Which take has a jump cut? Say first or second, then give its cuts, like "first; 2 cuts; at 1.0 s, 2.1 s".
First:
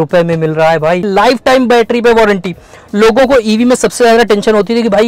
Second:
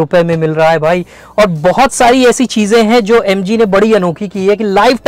first; 1 cut; at 1.0 s